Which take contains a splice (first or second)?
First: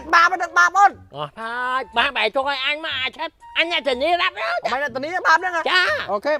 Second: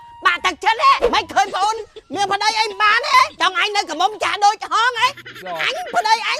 second